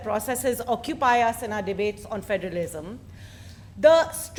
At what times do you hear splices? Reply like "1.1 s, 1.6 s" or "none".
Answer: none